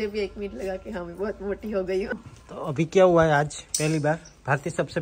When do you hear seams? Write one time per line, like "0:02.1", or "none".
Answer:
0:02.3